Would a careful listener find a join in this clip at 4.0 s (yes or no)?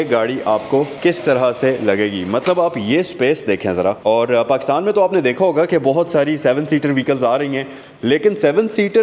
yes